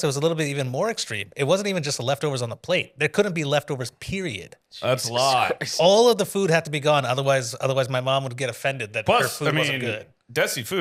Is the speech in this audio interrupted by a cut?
no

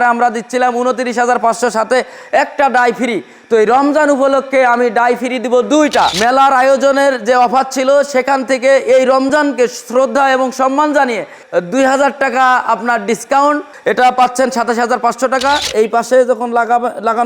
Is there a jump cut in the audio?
yes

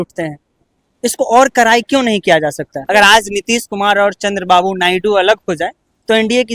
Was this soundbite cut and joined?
yes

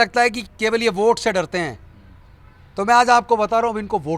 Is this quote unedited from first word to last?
yes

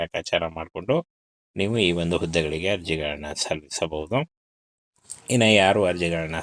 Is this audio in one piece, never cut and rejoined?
yes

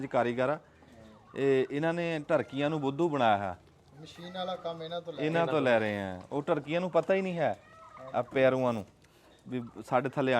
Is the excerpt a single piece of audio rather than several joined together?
yes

